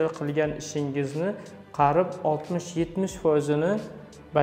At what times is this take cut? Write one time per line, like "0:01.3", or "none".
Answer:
none

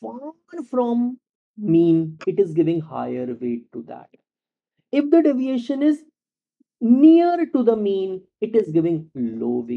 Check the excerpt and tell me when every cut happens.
none

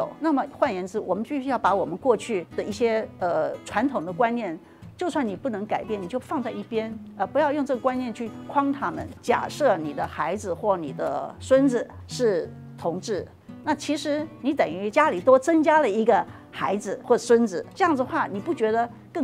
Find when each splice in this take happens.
0:09.1

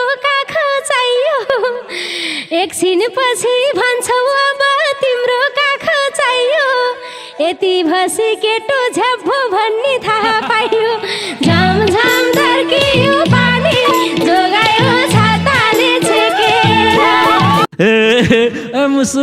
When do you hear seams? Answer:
0:17.7

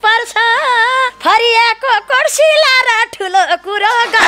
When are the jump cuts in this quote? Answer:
0:01.1

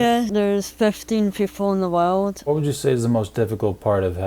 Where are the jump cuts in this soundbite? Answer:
0:02.4

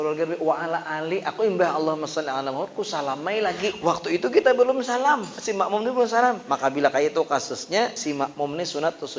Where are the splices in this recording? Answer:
0:03.8
0:05.4
0:06.5
0:08.0

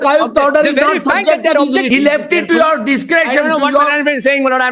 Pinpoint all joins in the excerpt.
0:01.9

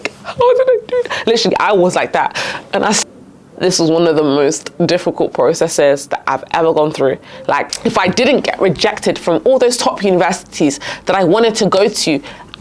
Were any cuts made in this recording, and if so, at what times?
0:03.0
0:07.8

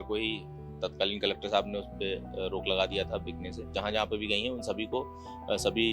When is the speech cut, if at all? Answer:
0:03.7

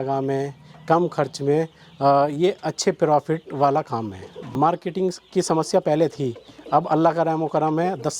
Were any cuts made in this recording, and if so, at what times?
0:04.5

